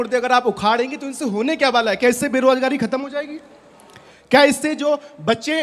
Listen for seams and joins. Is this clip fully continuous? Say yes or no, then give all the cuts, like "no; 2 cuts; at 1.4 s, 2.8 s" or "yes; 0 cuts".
yes; 0 cuts